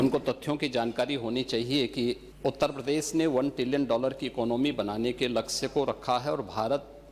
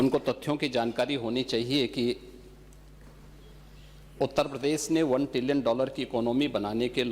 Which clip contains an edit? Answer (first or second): first